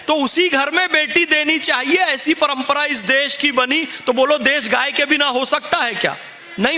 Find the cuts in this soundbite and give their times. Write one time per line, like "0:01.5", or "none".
none